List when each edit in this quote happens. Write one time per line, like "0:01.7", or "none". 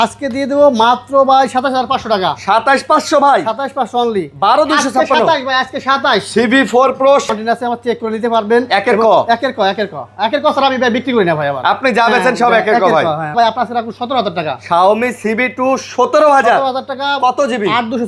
0:07.3
0:13.3

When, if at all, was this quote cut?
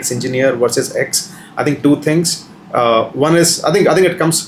none

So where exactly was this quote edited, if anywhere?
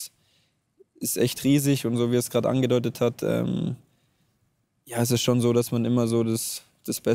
none

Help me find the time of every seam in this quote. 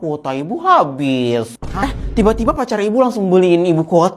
0:01.5

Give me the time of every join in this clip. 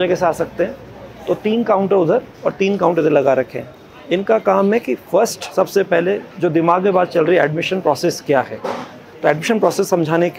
none

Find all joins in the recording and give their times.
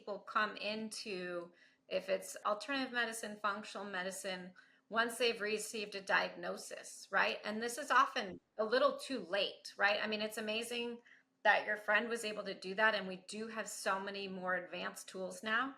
0:02.4

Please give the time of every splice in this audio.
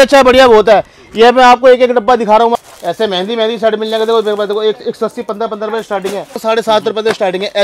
0:02.5
0:06.4

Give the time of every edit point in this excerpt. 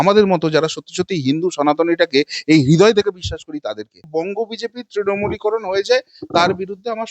0:04.1

